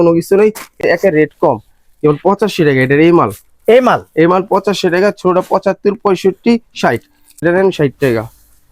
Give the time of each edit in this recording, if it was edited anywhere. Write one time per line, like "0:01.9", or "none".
0:00.8
0:07.4